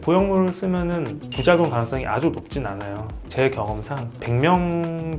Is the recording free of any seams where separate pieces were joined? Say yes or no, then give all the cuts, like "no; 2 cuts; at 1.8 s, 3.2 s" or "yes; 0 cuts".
no; 2 cuts; at 3.2 s, 4.2 s